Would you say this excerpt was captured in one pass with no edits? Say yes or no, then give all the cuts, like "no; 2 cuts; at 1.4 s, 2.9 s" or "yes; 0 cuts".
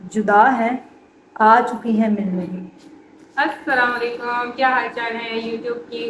yes; 0 cuts